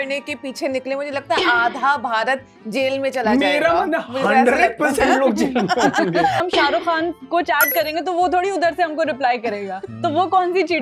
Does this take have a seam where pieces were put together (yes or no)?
yes